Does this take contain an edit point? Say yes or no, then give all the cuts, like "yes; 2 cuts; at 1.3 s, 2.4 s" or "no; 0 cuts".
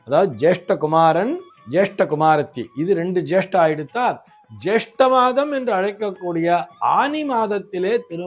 no; 0 cuts